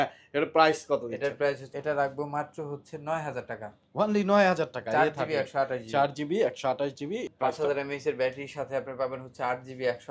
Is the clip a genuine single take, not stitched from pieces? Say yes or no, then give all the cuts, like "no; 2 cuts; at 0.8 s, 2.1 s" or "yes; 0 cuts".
no; 2 cuts; at 1.6 s, 7.3 s